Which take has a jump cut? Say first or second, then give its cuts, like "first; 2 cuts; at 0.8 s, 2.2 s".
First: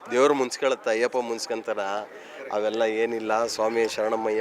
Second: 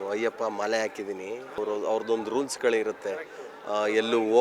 second; 1 cut; at 1.6 s